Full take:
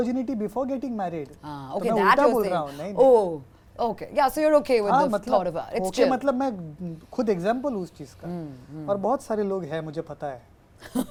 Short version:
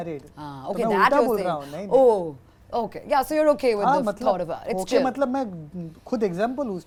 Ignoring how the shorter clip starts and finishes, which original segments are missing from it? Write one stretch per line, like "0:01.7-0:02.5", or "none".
none